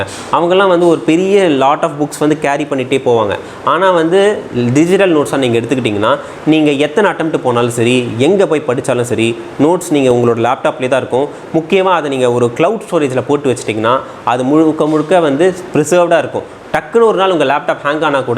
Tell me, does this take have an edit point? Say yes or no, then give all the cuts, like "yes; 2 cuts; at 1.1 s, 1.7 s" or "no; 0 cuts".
no; 0 cuts